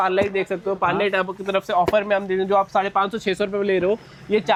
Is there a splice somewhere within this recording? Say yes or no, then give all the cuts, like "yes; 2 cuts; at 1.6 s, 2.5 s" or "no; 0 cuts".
no; 0 cuts